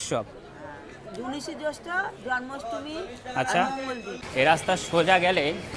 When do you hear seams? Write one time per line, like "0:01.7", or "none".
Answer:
0:04.2